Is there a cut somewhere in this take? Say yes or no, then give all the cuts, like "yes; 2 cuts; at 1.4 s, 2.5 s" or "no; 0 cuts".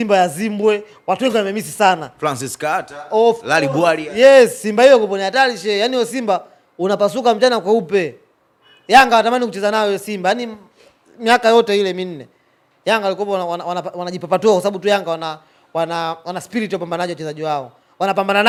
no; 0 cuts